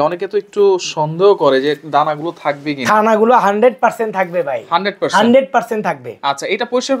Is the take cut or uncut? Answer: uncut